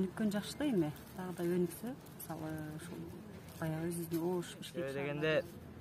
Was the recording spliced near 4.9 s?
yes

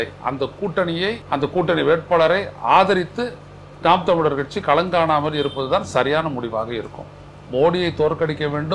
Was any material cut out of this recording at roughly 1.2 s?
yes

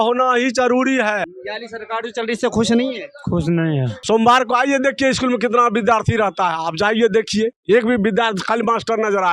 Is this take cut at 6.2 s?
no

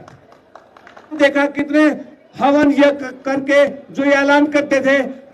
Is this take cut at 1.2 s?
yes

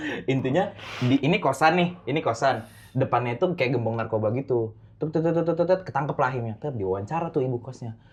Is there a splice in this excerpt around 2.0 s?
no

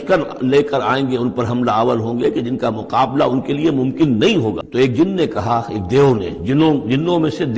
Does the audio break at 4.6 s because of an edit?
yes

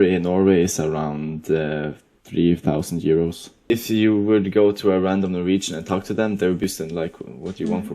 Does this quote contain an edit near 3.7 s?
yes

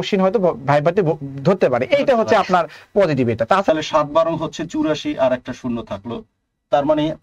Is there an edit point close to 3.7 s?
yes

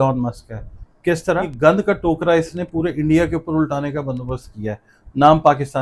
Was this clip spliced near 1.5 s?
yes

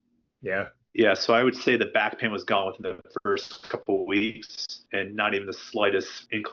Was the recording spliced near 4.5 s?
no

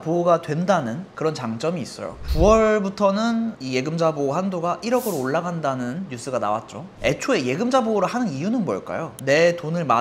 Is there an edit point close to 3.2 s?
no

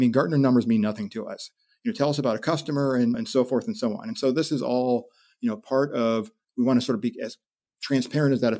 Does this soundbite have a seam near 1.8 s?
no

